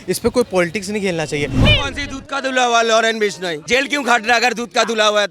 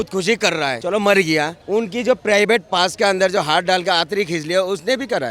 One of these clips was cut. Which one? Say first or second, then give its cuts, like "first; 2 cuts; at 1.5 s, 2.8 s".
first; 2 cuts; at 1.6 s, 3.5 s